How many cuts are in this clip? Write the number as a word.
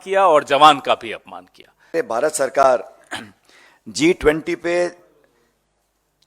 one